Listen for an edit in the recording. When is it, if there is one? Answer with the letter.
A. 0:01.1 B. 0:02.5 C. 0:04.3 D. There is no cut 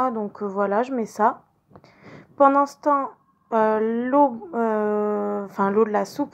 C